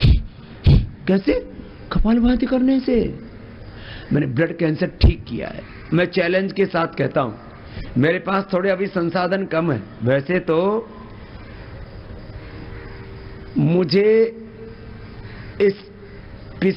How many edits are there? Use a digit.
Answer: 1